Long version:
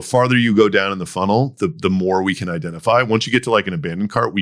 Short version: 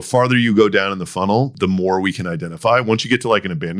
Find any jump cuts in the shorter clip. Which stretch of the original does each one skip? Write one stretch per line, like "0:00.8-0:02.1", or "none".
0:01.5-0:01.8

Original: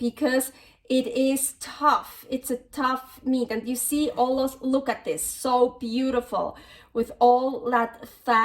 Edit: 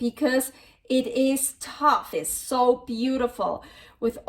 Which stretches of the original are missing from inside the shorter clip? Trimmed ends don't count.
0:02.1-0:05.1

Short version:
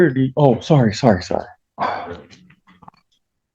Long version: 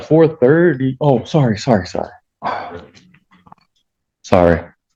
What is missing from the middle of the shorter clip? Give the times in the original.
none

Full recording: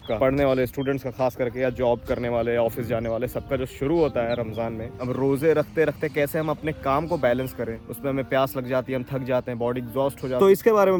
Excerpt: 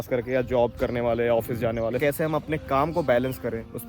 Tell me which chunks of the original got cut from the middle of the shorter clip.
0:03.3-0:06.1

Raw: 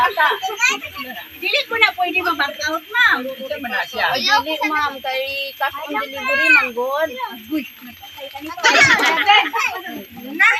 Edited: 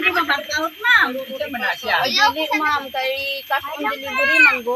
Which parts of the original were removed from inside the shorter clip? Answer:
none

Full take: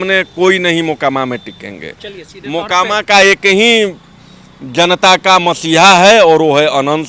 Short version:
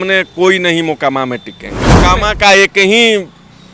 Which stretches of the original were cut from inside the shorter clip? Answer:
0:01.9-0:02.6

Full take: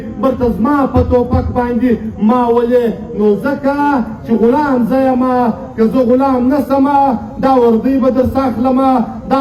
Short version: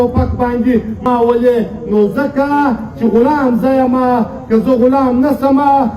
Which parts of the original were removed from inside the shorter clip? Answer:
0:02.2-0:02.3

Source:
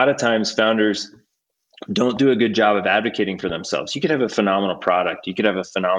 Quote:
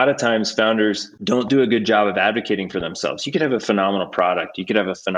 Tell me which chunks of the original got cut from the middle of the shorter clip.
0:01.1-0:01.8

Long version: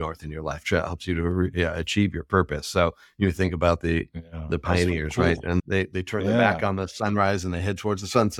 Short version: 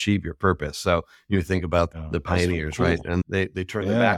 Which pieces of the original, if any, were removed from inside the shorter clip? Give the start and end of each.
0:03.8-0:04.3

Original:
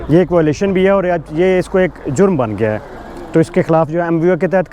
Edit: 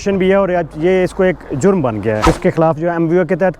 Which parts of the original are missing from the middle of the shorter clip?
0:02.8-0:03.4

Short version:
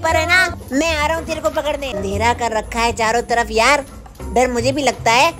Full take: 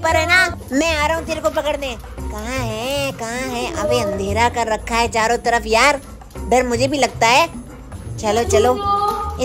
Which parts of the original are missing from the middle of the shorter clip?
0:02.0-0:04.1

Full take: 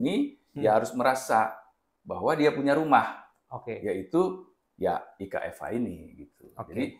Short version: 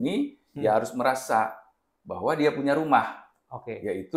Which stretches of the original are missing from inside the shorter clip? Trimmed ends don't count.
none

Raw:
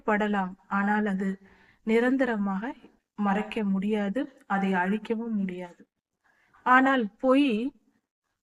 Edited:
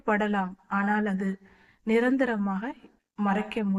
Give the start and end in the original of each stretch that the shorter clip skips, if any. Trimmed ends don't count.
none

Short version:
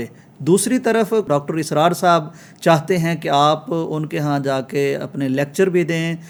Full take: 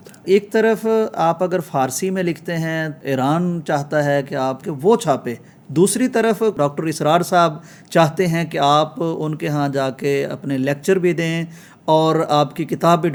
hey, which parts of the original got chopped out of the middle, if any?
none

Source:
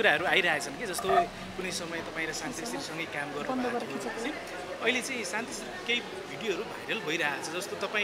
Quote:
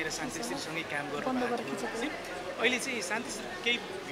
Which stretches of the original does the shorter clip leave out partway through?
none

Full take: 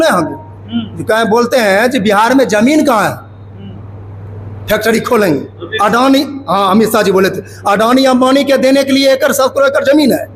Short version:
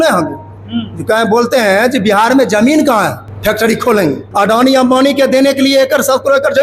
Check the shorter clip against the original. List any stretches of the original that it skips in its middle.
0:03.3-0:04.5
0:05.5-0:07.5

